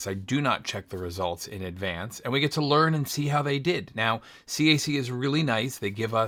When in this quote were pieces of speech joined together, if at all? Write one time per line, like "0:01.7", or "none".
none